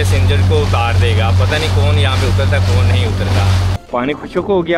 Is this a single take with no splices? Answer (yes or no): no